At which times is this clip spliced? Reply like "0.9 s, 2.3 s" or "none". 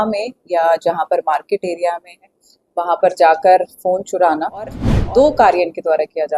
4.9 s